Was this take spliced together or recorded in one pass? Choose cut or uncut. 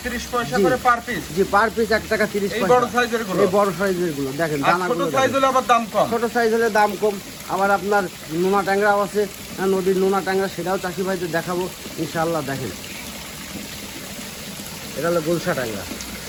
uncut